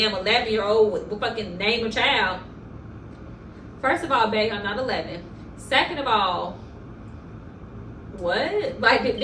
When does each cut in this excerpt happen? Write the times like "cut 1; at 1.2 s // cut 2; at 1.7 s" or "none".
none